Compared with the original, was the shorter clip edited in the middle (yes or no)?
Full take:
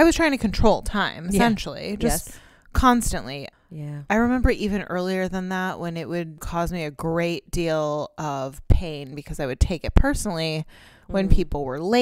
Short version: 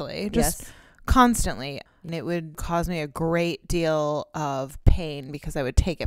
yes